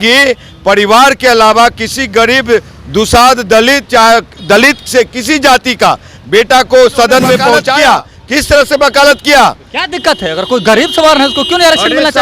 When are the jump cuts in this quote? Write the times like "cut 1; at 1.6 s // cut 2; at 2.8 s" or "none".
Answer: cut 1; at 7.7 s